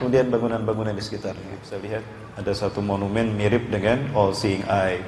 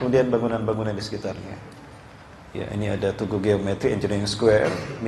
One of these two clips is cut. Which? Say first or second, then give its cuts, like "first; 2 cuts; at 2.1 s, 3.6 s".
first; 1 cut; at 1.7 s